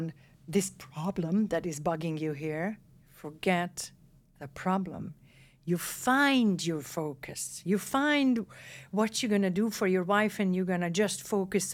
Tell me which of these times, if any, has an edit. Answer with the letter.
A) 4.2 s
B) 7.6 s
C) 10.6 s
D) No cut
D